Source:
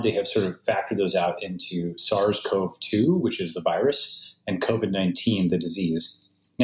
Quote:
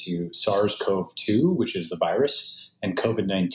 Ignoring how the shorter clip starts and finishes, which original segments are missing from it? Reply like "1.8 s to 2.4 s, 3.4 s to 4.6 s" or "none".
none